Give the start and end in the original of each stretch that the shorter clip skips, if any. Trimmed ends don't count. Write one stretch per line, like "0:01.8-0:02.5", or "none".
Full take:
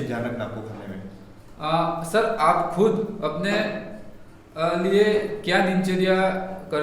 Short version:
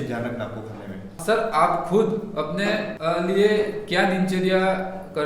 0:01.2-0:02.0
0:03.8-0:04.5